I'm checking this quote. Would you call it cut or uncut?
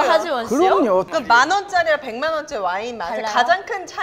cut